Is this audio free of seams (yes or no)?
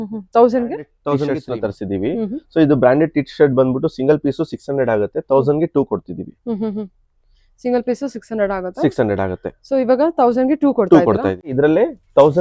no